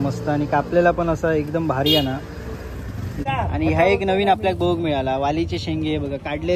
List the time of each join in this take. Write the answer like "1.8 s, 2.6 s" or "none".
3.2 s